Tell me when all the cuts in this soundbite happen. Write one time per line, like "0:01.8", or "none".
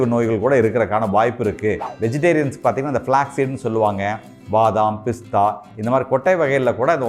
0:01.9